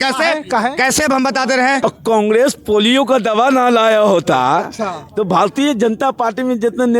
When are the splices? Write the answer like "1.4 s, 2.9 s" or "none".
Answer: 1.8 s